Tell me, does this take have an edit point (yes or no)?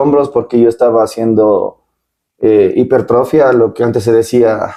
no